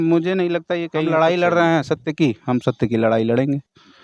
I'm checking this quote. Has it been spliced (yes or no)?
yes